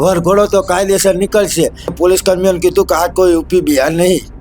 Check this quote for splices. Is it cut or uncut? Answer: cut